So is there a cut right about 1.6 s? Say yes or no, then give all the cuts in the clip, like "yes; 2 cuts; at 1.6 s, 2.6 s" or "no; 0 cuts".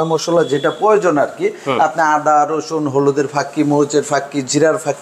no; 0 cuts